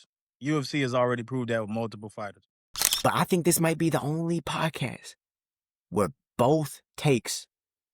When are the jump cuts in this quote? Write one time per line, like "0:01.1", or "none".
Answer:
0:02.7